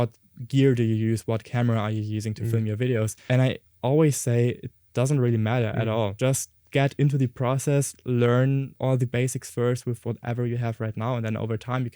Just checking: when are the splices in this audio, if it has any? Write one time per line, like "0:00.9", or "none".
0:03.2
0:06.1
0:08.7